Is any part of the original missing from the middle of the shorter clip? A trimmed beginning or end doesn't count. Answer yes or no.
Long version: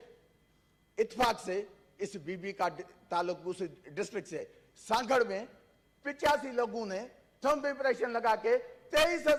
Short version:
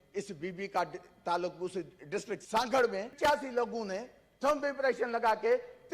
yes